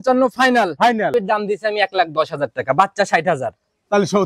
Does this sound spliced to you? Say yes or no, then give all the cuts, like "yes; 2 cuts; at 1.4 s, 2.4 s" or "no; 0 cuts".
yes; 1 cut; at 1.1 s